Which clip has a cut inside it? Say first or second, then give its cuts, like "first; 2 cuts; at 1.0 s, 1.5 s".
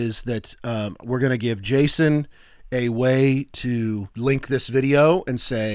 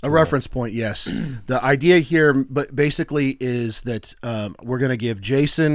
first; 1 cut; at 4.1 s